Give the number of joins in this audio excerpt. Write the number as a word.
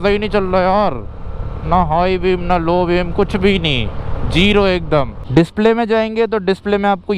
one